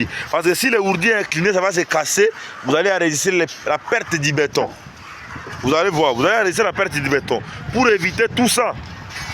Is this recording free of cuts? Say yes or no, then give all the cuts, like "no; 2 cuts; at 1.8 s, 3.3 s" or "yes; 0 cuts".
yes; 0 cuts